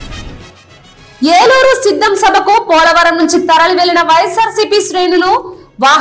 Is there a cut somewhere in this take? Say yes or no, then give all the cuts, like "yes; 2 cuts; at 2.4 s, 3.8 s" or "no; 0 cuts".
yes; 1 cut; at 1.0 s